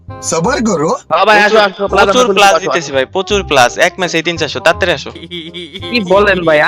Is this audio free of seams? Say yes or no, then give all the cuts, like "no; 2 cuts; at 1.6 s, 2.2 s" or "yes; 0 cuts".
yes; 0 cuts